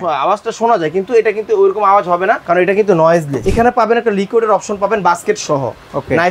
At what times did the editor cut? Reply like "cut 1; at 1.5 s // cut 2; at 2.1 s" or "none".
cut 1; at 2.4 s // cut 2; at 3.4 s